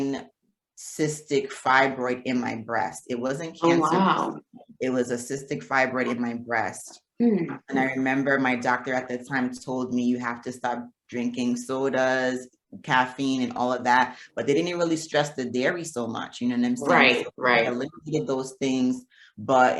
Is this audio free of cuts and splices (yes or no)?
yes